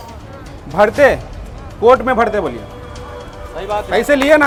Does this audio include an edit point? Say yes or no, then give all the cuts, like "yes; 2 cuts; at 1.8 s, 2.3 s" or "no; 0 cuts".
no; 0 cuts